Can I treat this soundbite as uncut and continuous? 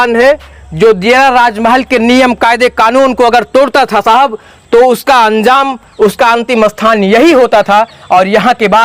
yes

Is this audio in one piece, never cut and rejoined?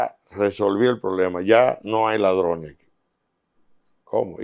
yes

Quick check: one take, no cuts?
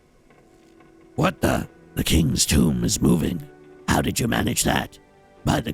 no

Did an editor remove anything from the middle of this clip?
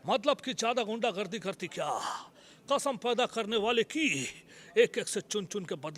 no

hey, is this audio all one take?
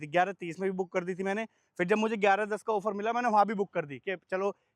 yes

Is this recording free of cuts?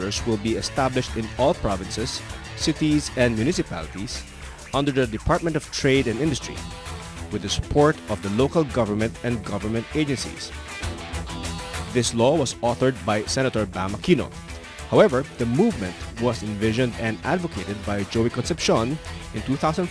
yes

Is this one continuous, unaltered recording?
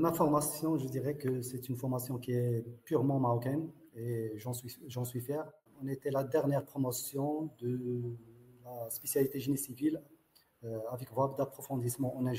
no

